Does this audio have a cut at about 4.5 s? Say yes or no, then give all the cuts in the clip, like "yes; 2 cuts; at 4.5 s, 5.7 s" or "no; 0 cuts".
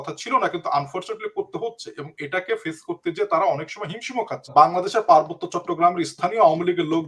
yes; 1 cut; at 4.5 s